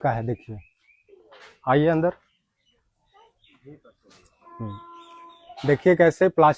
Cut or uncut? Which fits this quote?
uncut